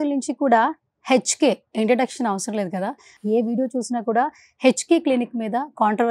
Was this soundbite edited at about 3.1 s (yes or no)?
yes